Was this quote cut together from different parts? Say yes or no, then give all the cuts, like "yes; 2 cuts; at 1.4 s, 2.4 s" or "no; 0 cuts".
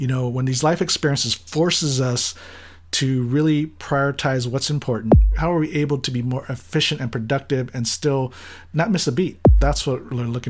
yes; 2 cuts; at 5.3 s, 9.6 s